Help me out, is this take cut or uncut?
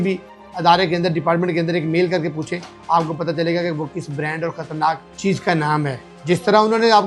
cut